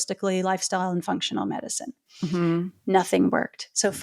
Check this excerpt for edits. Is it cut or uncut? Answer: uncut